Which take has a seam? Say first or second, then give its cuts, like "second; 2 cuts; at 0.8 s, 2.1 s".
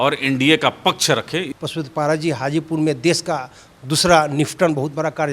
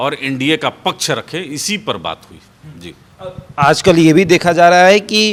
first; 1 cut; at 1.5 s